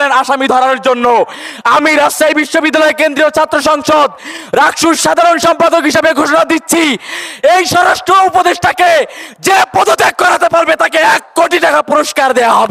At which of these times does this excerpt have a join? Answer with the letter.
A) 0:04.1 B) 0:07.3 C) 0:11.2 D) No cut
D